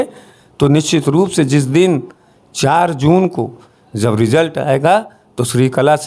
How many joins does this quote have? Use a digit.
0